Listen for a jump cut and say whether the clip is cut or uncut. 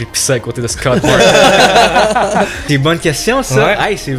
cut